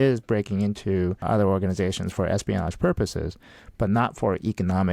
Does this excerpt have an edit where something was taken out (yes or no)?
yes